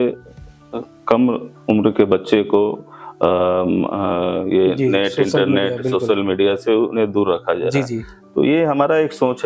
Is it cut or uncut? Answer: uncut